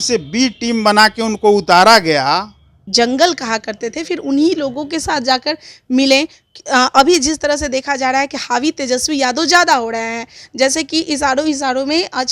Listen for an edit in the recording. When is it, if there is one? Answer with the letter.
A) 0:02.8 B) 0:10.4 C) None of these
A